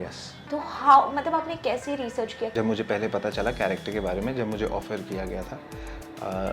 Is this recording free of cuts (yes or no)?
no